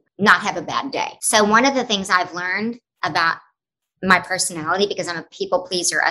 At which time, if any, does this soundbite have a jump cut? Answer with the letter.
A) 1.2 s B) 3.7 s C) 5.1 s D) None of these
A